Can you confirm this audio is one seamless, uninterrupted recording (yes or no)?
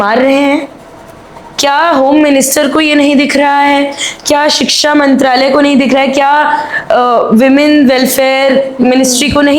yes